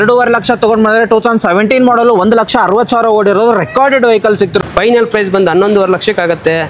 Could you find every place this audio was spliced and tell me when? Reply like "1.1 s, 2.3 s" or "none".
4.6 s